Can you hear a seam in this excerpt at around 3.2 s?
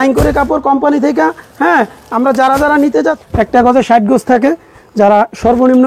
yes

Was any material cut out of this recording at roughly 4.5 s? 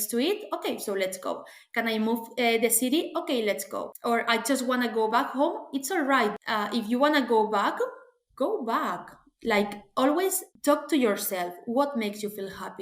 no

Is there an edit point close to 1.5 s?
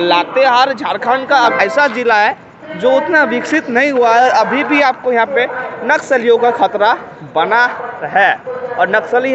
yes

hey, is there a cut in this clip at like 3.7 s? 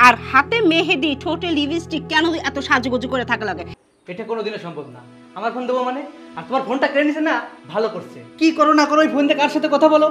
yes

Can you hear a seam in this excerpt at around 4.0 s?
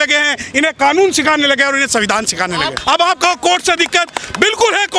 no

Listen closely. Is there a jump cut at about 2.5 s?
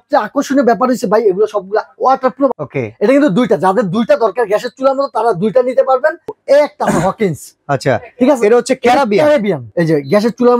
yes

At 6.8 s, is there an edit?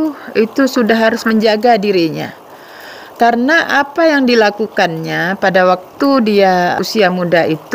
yes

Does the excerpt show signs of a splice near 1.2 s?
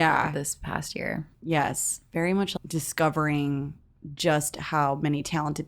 yes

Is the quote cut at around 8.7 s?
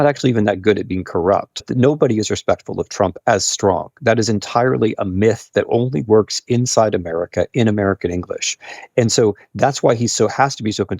no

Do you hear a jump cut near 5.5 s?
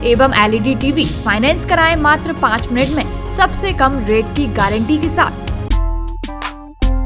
yes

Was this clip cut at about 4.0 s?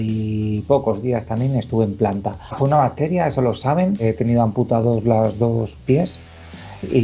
yes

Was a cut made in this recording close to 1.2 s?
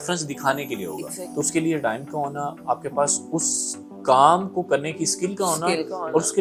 yes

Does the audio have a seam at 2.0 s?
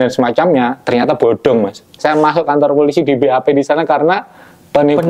yes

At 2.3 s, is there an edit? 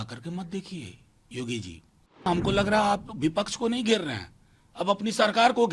yes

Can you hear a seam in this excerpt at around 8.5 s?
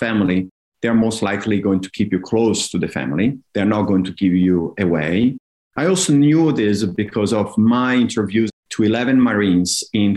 yes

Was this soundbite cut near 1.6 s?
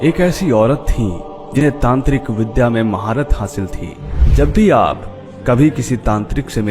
yes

